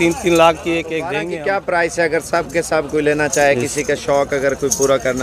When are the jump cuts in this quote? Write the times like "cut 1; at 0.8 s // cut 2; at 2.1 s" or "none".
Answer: cut 1; at 1.2 s